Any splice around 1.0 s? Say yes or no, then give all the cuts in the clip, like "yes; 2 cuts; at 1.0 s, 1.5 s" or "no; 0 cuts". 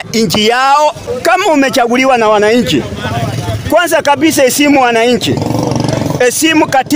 yes; 1 cut; at 1.0 s